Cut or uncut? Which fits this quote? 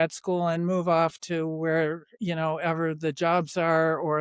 uncut